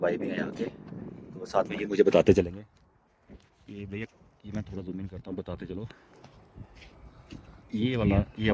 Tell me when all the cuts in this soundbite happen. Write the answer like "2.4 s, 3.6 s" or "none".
none